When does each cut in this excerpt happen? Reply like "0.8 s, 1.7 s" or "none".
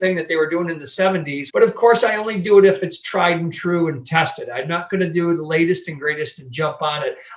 1.4 s